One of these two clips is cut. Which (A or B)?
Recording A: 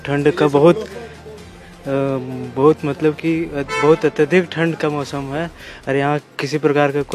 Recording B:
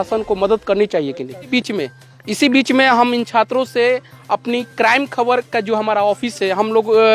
B